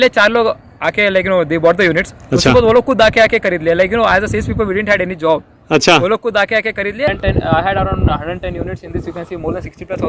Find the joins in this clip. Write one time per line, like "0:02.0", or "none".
0:07.1